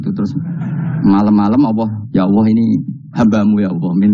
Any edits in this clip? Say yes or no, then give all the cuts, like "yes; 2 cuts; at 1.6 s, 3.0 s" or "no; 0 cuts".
yes; 1 cut; at 2.0 s